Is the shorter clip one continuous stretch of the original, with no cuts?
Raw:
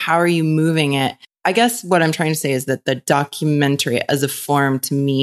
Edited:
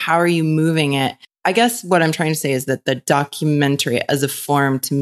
yes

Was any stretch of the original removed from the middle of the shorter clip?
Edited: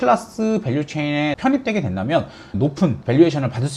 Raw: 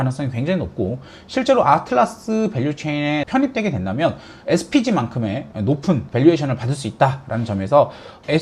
yes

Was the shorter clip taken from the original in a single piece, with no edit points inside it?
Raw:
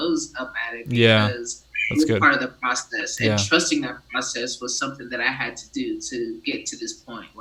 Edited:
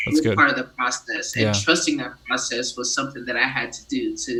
yes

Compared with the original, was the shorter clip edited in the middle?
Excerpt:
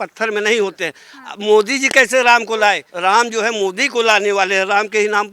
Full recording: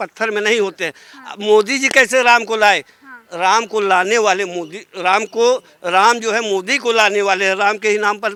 yes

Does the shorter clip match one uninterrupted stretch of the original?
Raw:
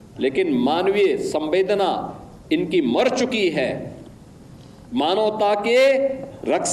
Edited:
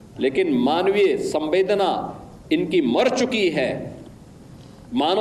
yes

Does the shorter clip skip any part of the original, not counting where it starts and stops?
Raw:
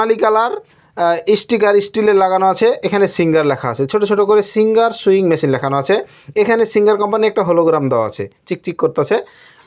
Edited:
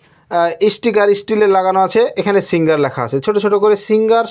no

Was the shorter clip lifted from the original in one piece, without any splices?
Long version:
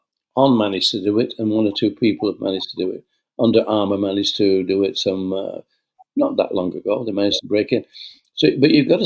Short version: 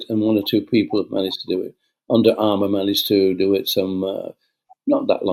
yes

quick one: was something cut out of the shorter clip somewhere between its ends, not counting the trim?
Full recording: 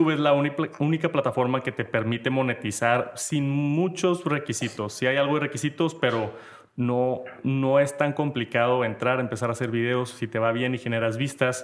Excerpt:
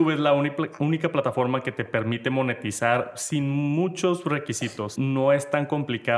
yes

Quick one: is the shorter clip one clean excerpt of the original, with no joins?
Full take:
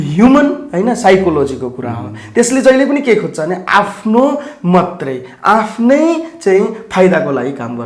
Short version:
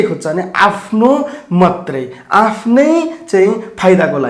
yes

